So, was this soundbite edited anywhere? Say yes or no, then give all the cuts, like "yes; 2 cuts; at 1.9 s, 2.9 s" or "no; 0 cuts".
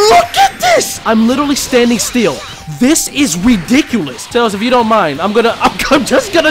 yes; 2 cuts; at 0.9 s, 4.2 s